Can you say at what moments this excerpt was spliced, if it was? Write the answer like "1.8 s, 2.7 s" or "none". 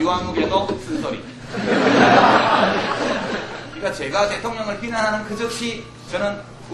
3.5 s